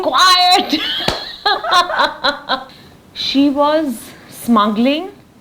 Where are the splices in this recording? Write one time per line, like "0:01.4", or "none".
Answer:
0:02.7